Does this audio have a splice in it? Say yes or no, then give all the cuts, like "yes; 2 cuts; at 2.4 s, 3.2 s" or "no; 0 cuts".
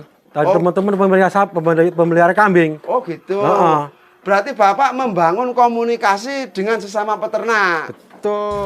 no; 0 cuts